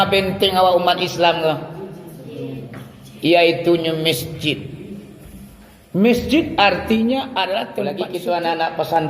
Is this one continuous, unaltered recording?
no; 1 cut; at 7.9 s

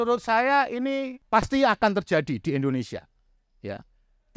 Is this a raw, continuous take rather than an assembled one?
no; 1 cut; at 1.2 s

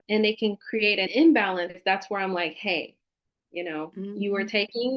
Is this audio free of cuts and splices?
no; 2 cuts; at 1.1 s, 1.8 s

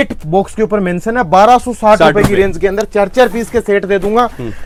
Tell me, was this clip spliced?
no; 0 cuts

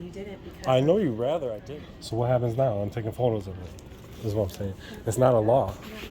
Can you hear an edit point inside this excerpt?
yes; 1 cut; at 1.5 s

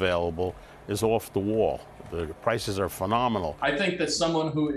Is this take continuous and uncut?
no; 1 cut; at 3.5 s

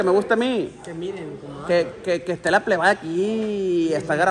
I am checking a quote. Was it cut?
no; 0 cuts

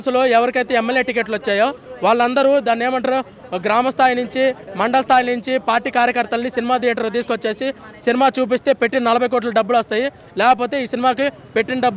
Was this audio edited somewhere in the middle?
no; 0 cuts

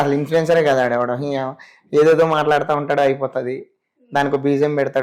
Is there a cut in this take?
no; 0 cuts

